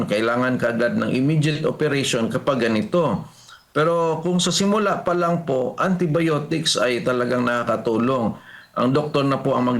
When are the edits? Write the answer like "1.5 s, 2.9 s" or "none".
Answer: none